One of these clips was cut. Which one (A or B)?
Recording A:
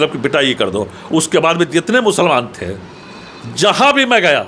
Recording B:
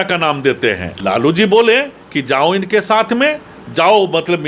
B